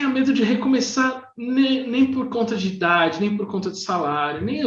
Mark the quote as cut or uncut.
uncut